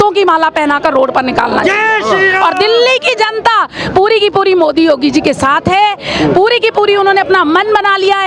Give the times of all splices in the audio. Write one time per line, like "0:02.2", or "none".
none